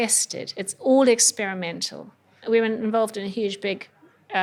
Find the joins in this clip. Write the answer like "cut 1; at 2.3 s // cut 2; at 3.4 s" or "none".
none